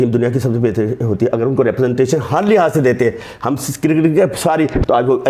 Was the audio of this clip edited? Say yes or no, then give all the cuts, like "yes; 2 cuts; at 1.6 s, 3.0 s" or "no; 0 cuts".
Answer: no; 0 cuts